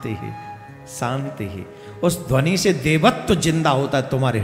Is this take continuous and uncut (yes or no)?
yes